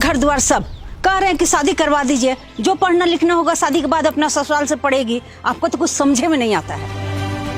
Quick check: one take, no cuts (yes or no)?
yes